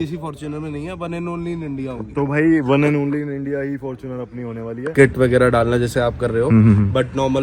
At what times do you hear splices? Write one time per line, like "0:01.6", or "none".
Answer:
0:04.9

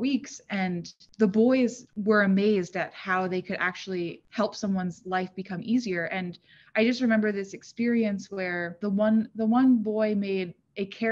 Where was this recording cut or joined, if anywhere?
0:01.0
0:01.9
0:04.2
0:08.8

